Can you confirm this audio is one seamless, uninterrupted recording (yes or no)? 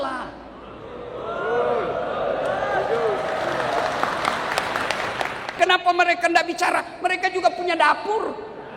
no